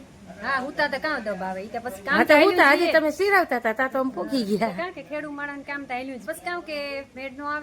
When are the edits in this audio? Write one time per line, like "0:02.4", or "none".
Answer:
0:06.2